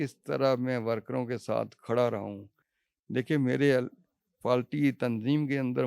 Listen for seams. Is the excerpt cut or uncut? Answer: uncut